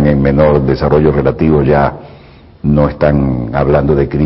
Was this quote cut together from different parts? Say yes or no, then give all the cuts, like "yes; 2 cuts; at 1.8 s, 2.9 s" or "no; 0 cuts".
yes; 1 cut; at 1.8 s